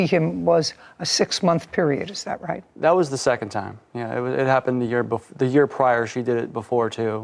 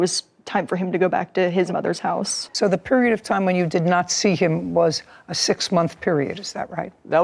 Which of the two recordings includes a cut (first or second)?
second